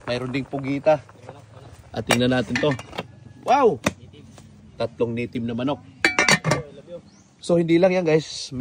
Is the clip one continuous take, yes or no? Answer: yes